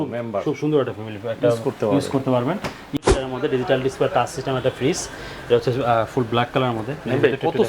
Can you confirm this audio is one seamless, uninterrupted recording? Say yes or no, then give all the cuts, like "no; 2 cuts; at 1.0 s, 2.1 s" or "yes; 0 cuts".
no; 1 cut; at 3.0 s